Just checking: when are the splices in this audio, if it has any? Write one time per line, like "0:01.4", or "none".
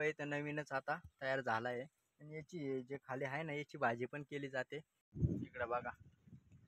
0:05.1